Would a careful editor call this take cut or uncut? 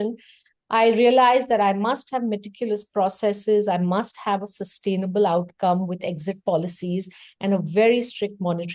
uncut